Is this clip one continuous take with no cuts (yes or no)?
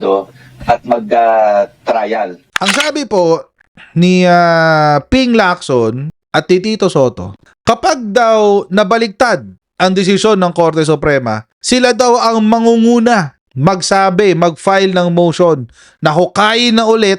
no